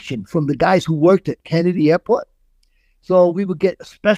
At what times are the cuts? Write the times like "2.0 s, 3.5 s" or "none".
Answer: none